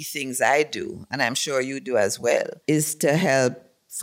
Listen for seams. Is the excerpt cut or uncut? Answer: cut